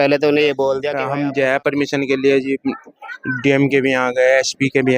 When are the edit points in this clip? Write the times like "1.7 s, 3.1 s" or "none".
0.9 s